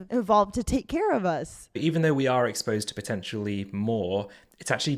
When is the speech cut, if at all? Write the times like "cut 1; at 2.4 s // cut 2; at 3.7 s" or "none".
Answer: cut 1; at 1.6 s